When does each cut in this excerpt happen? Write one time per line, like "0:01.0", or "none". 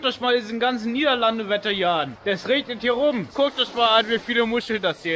0:02.1
0:03.3